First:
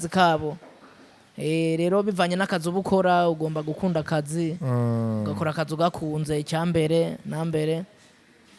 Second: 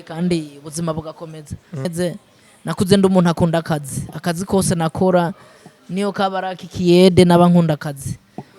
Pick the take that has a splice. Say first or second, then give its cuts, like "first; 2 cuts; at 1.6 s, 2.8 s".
second; 1 cut; at 1.9 s